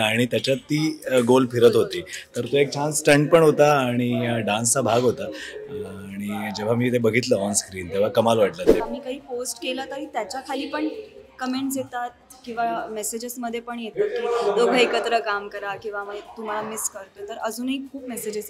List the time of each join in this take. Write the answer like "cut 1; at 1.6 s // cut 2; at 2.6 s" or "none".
cut 1; at 8.8 s